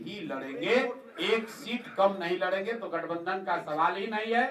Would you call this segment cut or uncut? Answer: uncut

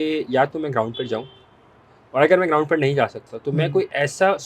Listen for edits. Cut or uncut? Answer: uncut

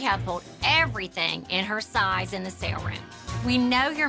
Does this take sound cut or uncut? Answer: uncut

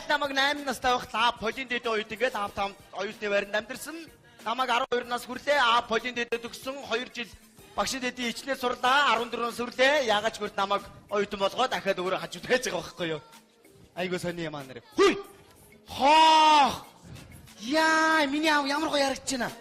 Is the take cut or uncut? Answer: cut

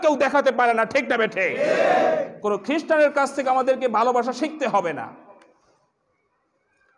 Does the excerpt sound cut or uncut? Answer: cut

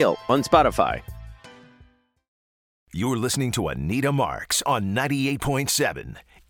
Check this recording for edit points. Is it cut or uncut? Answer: cut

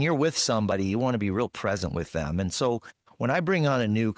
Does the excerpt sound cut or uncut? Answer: uncut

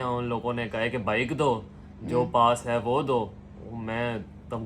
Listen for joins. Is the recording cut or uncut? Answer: uncut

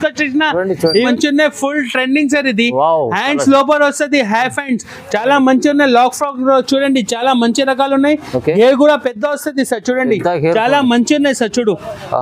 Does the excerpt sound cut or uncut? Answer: cut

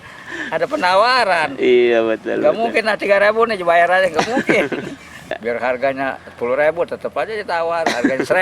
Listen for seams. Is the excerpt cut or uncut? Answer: cut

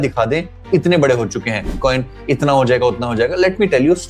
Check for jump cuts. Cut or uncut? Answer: cut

